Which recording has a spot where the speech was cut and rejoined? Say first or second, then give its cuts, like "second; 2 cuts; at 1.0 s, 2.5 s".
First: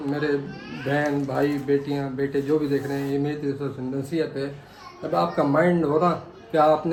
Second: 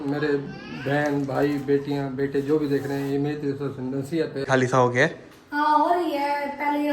second; 1 cut; at 4.5 s